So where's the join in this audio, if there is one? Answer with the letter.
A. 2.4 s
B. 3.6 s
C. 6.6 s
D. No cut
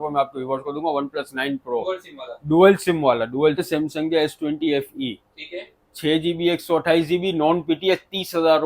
B